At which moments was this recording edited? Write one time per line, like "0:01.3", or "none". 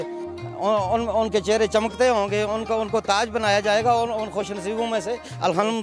none